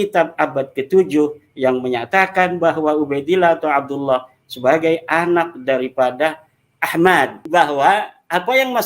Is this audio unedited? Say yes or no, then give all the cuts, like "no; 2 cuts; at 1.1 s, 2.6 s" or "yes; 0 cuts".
no; 1 cut; at 7.4 s